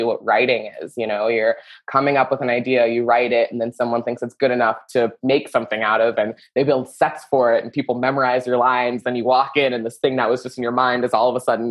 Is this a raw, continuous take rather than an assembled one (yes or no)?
yes